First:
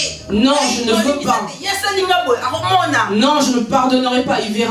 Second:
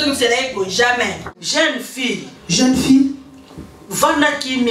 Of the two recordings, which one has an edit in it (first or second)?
second